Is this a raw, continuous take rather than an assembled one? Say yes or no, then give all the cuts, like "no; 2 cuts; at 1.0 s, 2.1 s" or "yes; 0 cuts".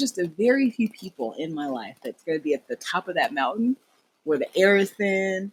yes; 0 cuts